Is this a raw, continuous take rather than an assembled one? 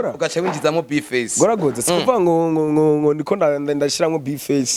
yes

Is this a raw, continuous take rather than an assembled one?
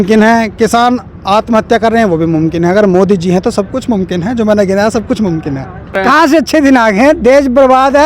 no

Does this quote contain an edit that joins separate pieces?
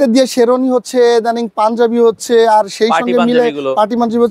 no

